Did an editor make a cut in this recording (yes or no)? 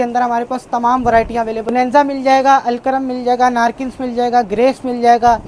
yes